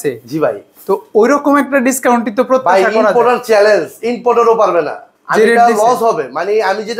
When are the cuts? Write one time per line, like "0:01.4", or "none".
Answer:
none